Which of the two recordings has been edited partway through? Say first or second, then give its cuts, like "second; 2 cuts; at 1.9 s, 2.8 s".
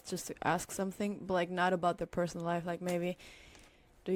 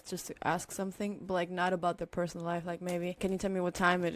second; 1 cut; at 3.2 s